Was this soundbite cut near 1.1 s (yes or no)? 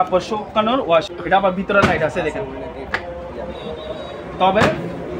yes